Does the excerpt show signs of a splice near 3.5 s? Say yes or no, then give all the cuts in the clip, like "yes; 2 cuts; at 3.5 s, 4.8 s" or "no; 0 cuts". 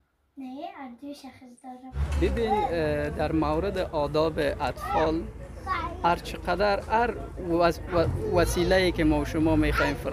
no; 1 cut; at 2.2 s